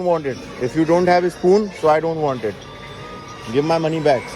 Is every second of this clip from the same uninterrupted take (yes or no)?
yes